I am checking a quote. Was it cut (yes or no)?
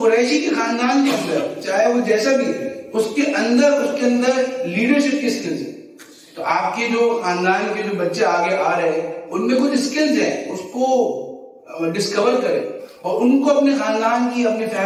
no